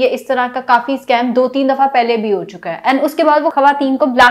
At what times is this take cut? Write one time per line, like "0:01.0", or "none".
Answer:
none